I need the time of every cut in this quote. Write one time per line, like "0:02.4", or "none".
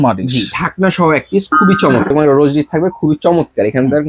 0:02.1